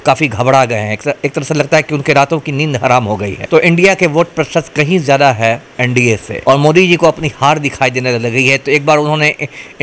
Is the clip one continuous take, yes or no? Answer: no